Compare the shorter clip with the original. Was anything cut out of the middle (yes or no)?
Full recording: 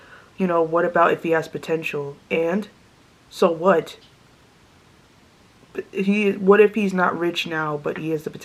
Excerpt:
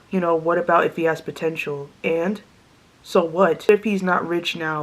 yes